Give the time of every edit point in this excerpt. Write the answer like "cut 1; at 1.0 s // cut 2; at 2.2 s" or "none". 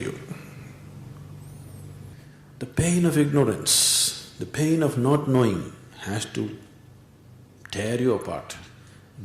cut 1; at 2.1 s